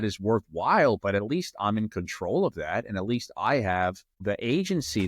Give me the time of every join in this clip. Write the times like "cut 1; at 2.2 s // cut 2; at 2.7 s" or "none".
cut 1; at 4.1 s